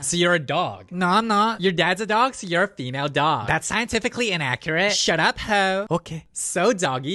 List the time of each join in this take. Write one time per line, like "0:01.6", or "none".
none